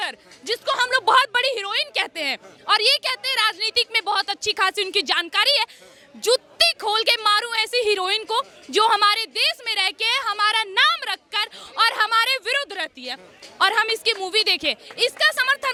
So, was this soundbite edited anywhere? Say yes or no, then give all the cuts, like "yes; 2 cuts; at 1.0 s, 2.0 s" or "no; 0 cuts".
no; 0 cuts